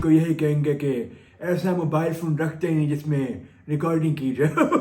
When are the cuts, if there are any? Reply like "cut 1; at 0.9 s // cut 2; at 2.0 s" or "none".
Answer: none